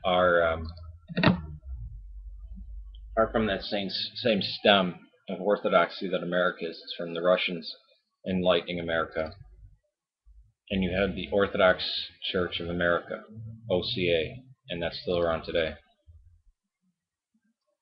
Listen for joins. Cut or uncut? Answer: uncut